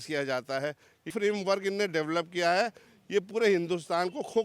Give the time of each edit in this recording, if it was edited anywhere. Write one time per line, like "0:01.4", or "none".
0:01.1